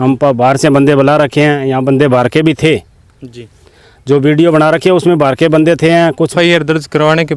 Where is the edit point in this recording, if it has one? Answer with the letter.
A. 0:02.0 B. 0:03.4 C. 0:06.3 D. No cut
C